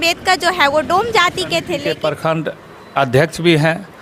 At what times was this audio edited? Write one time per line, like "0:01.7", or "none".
0:01.7